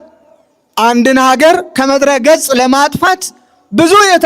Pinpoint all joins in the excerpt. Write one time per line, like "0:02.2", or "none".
0:01.7